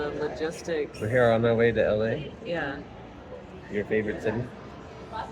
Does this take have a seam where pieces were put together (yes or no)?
no